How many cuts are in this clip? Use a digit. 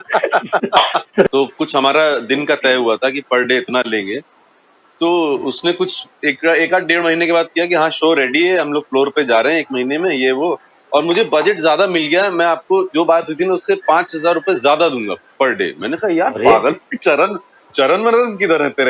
1